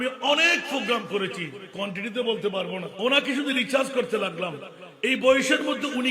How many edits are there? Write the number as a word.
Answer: one